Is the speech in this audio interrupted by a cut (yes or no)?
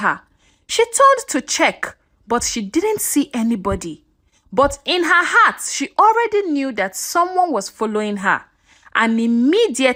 no